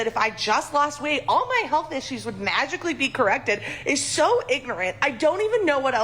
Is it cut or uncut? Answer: cut